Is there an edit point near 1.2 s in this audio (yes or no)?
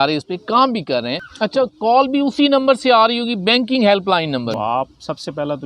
yes